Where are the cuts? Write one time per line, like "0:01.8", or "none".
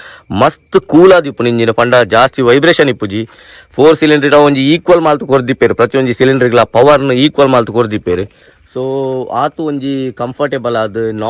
none